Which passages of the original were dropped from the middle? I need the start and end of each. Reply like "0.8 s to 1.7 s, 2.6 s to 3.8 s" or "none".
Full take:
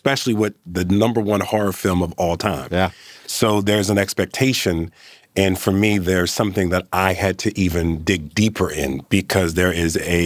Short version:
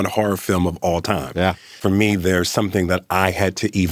3.1 s to 5.6 s